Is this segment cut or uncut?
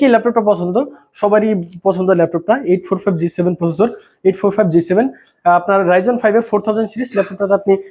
uncut